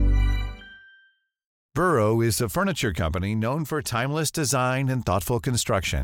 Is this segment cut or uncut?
cut